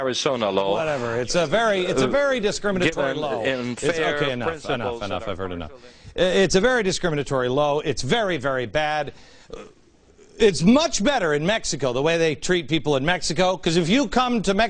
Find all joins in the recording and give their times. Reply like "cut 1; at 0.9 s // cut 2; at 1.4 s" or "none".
cut 1; at 7.7 s